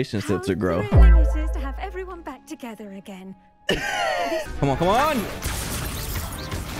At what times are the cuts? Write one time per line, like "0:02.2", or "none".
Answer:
0:04.4